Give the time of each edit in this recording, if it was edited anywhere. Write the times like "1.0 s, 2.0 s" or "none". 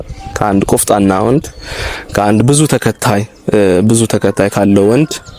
none

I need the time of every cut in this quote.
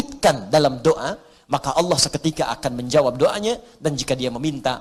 none

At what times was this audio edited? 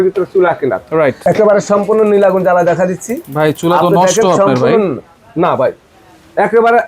1.2 s

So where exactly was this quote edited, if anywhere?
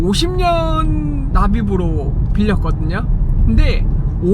1.3 s

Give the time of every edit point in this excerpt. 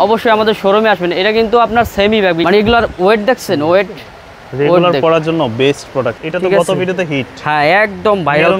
2.4 s, 6.2 s

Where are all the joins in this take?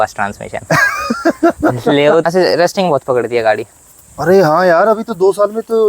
2.2 s

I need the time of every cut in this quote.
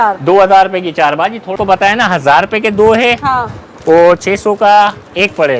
1.5 s

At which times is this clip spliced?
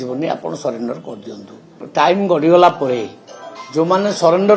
1.8 s

